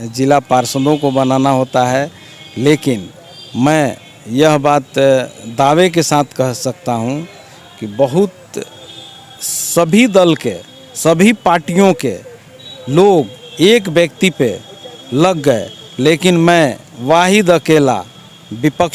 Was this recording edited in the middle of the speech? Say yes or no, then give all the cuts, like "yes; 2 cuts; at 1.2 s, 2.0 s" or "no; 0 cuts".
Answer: no; 0 cuts